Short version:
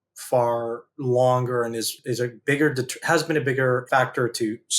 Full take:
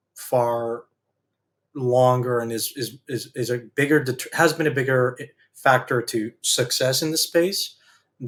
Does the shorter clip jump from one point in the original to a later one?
yes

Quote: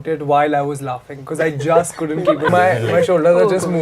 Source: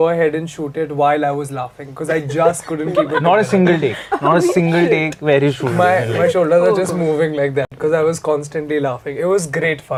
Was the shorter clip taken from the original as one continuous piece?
no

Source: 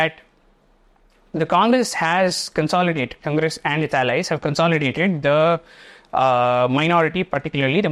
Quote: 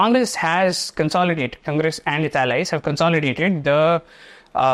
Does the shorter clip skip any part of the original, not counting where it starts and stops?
no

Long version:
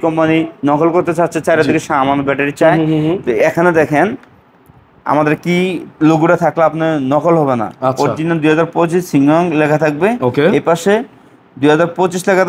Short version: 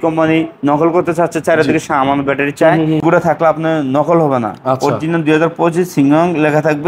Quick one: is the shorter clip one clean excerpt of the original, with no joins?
no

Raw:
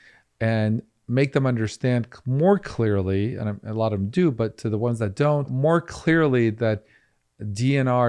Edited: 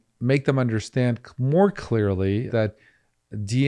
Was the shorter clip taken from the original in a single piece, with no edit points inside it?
no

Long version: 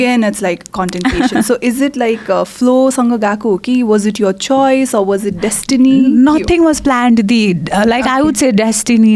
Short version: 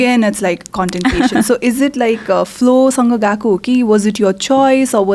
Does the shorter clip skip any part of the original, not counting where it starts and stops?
no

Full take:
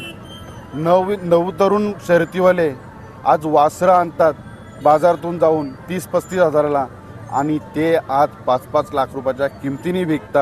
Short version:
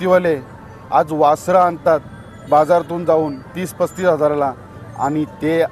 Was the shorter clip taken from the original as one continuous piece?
yes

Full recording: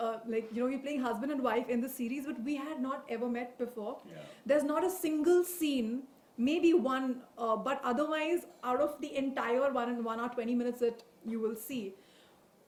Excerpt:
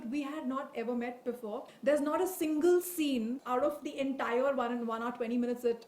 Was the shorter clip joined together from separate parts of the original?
yes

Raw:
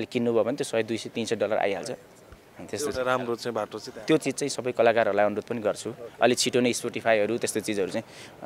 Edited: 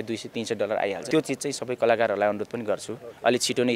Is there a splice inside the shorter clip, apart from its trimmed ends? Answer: yes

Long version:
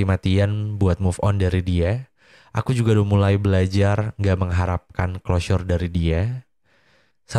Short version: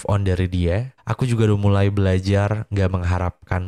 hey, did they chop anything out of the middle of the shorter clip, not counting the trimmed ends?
yes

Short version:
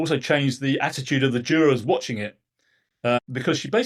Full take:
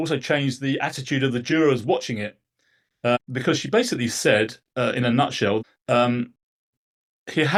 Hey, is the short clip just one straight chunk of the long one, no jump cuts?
yes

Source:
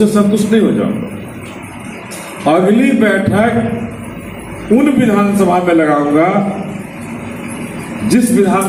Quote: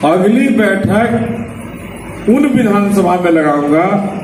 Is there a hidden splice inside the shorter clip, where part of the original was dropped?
no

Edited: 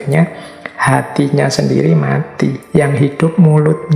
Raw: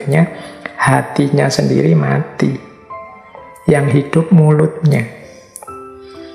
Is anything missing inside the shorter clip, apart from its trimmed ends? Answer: yes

